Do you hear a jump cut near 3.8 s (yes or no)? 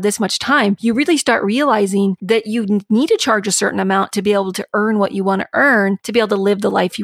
no